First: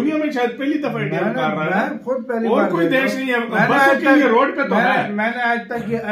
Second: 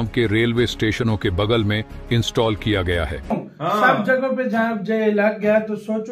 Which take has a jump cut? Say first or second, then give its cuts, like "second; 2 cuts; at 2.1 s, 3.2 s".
second; 1 cut; at 3.3 s